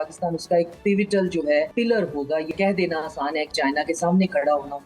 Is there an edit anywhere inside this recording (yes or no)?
yes